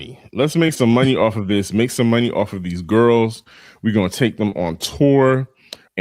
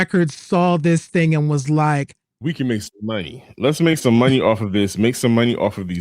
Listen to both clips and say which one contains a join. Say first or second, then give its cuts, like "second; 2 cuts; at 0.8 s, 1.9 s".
second; 1 cut; at 2.2 s